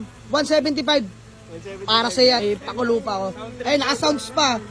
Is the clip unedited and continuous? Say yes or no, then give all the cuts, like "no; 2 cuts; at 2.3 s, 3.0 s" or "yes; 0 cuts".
yes; 0 cuts